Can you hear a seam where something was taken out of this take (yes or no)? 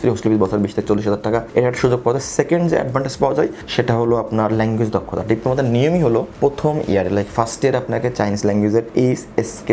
no